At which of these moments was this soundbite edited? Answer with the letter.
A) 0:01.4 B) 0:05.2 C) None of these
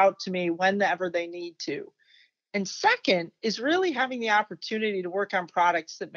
C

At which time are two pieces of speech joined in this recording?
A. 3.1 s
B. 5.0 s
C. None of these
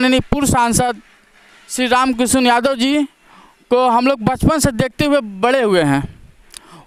C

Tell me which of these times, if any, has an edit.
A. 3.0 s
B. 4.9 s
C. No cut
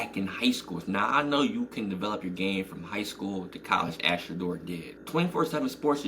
B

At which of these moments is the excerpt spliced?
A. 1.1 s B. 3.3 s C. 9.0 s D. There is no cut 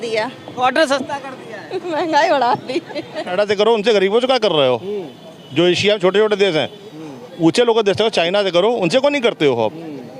B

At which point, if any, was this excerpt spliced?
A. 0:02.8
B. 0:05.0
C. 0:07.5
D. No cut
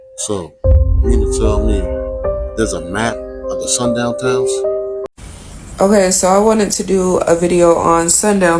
B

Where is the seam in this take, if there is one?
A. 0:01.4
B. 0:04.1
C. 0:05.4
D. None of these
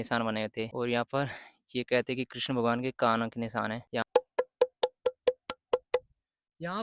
B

